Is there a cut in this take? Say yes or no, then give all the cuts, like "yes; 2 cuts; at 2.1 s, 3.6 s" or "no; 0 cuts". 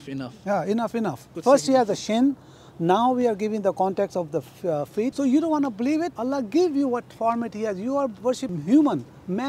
yes; 4 cuts; at 1.4 s, 5.1 s, 6.2 s, 8.5 s